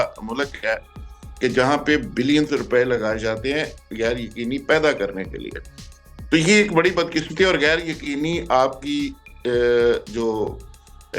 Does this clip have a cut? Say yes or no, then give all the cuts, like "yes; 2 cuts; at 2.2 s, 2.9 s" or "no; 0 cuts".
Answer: no; 0 cuts